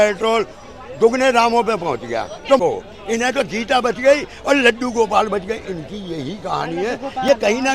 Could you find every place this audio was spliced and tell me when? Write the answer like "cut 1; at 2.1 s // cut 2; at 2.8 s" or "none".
cut 1; at 2.6 s

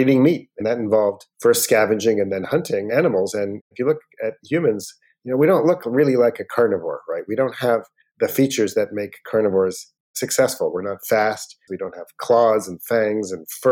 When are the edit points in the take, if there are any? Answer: cut 1; at 11.7 s

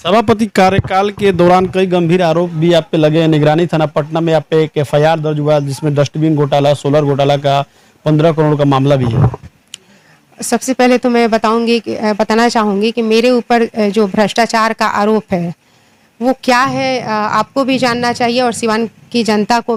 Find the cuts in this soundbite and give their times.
none

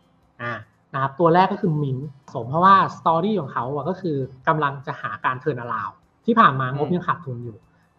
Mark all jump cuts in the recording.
cut 1; at 2.4 s

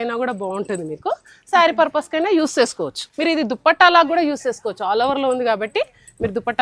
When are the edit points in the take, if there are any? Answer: cut 1; at 3.0 s

